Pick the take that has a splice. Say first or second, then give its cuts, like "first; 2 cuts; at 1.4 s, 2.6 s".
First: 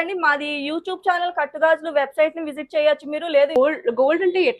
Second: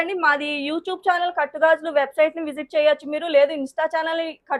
first; 1 cut; at 3.6 s